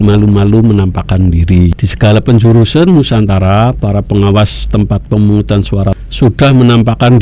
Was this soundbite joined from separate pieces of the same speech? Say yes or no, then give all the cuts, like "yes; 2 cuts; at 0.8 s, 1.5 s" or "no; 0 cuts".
yes; 2 cuts; at 1.7 s, 6.0 s